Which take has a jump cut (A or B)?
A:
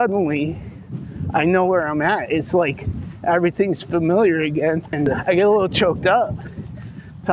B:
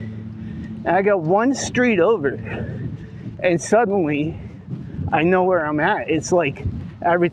A